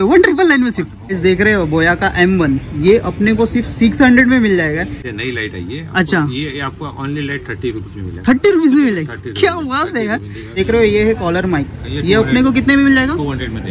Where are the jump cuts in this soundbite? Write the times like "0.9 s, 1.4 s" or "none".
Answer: 1.1 s, 5.1 s, 10.5 s